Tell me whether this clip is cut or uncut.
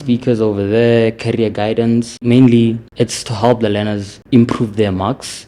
cut